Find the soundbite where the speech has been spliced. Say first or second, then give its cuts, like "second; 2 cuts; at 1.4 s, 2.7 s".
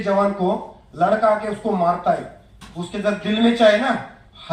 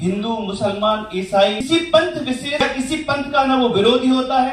second; 2 cuts; at 1.6 s, 2.6 s